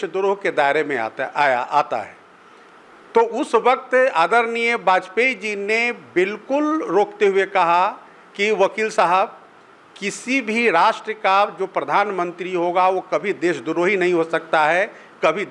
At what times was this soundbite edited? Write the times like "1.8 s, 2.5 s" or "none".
none